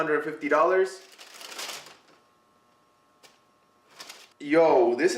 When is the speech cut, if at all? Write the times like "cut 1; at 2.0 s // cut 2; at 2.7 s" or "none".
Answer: cut 1; at 4.2 s